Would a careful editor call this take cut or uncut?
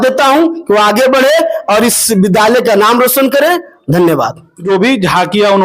uncut